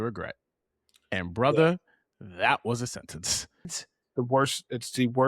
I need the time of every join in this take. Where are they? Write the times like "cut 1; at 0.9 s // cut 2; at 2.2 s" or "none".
cut 1; at 3.7 s

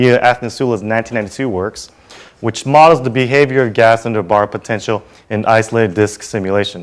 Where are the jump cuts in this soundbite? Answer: none

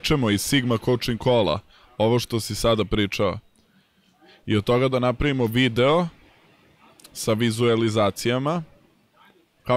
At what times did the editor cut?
none

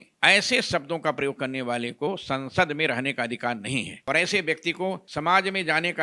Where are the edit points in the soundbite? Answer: cut 1; at 3.9 s // cut 2; at 5.1 s

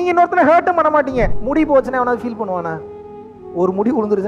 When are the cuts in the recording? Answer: cut 1; at 1.3 s

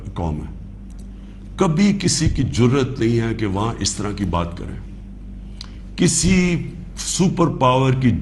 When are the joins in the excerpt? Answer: none

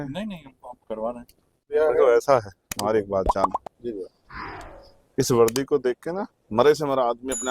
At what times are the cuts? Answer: cut 1; at 1.7 s

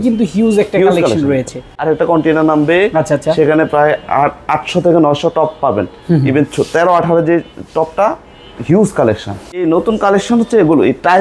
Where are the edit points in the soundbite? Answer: cut 1; at 1.8 s // cut 2; at 9.6 s

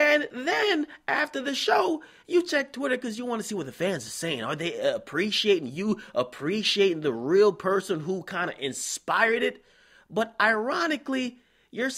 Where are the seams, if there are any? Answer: none

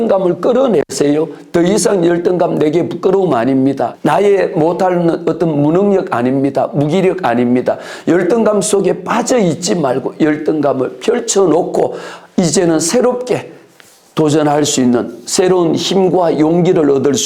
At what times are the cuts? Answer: cut 1; at 3.9 s

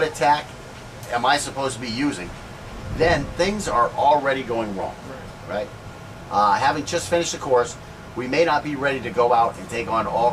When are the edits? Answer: cut 1; at 9.4 s

